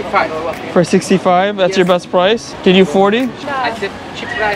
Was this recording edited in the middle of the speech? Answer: yes; 2 cuts; at 2.5 s, 3.4 s

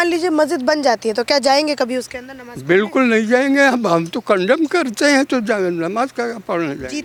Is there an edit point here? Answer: no; 0 cuts

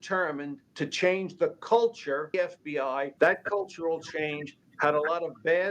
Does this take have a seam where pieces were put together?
yes; 1 cut; at 2.4 s

